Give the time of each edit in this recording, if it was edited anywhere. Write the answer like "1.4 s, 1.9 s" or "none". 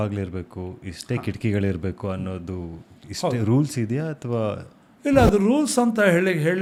none